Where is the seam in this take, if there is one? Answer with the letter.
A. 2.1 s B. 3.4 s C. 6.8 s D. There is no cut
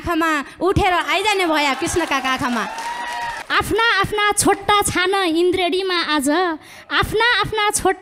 B